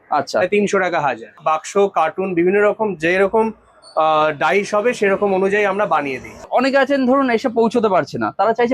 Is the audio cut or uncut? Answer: cut